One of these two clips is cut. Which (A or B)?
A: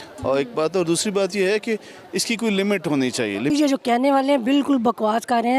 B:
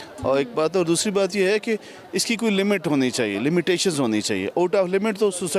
A